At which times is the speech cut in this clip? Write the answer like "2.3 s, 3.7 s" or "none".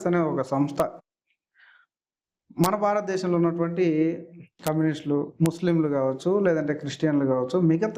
none